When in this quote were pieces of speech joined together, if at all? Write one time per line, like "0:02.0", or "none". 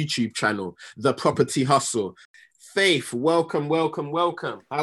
0:02.2